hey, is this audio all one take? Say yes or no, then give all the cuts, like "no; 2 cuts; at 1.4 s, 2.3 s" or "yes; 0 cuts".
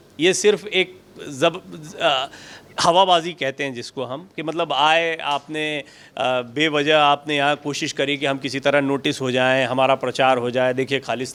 yes; 0 cuts